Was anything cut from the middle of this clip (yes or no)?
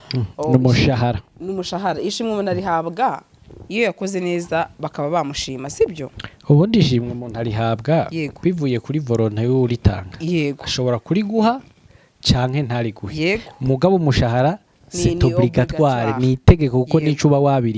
no